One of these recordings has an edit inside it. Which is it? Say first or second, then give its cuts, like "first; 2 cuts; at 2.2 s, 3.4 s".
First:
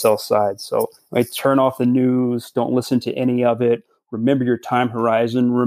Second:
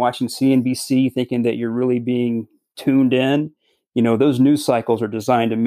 first; 1 cut; at 1.0 s